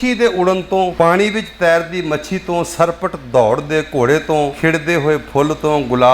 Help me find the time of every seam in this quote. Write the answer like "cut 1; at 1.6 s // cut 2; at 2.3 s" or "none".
cut 1; at 0.9 s // cut 2; at 4.5 s